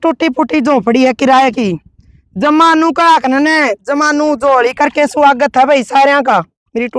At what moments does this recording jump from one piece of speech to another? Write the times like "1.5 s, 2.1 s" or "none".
none